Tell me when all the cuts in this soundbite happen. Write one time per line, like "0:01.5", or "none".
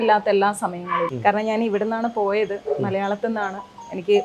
0:01.1